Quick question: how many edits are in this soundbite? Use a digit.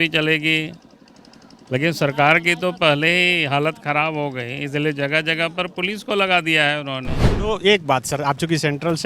1